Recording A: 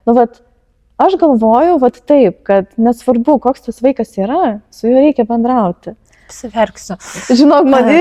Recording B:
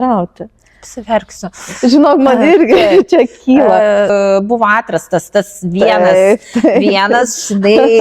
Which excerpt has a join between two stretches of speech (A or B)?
B